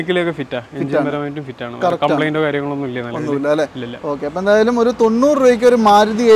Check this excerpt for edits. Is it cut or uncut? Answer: uncut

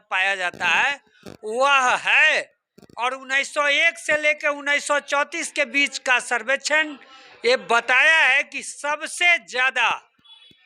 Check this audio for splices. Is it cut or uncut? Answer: uncut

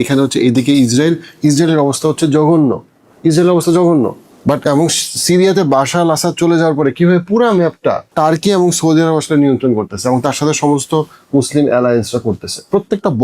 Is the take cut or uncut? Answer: cut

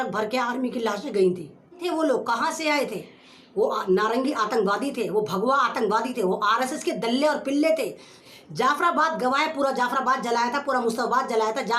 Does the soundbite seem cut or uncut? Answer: cut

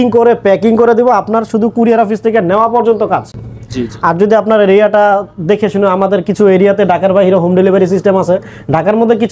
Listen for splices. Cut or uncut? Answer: uncut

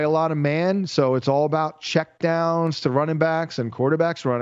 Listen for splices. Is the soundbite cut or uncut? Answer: uncut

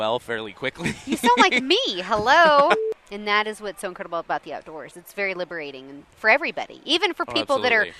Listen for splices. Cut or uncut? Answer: cut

